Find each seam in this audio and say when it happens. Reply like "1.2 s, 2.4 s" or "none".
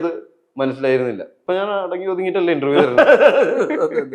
1.3 s

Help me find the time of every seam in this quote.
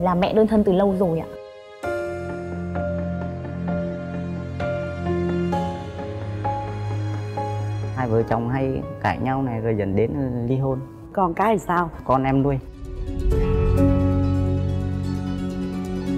8.0 s

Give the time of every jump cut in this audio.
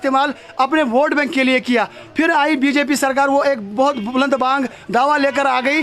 none

